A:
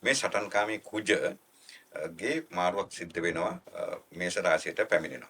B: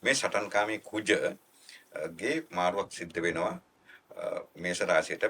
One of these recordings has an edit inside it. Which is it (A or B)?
A